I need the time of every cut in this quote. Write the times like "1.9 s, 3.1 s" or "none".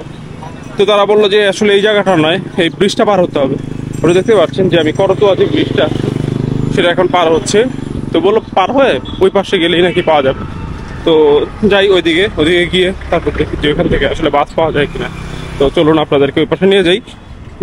none